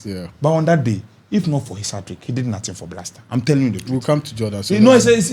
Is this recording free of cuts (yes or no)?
yes